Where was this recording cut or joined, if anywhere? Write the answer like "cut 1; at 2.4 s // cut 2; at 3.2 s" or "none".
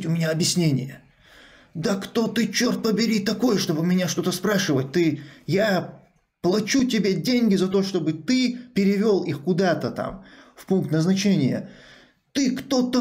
none